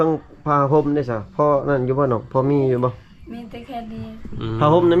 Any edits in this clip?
no; 0 cuts

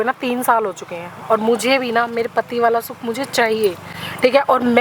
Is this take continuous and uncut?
yes; 0 cuts

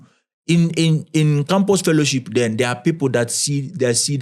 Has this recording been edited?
no; 0 cuts

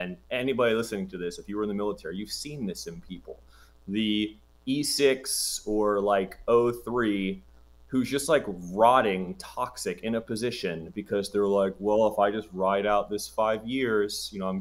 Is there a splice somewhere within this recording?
no; 0 cuts

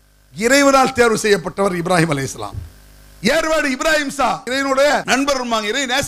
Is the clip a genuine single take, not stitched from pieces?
yes; 0 cuts

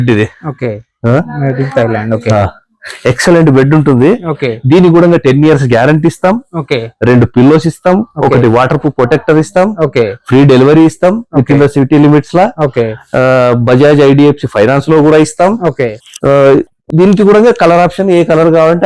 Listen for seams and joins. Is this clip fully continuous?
yes; 0 cuts

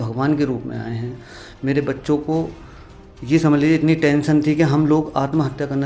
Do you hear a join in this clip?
no; 0 cuts

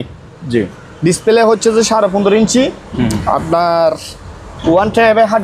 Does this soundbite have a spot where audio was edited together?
no; 0 cuts

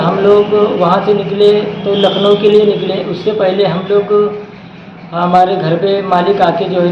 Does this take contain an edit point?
no; 0 cuts

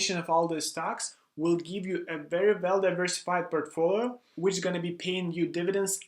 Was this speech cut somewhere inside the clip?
yes; 1 cut; at 4.3 s

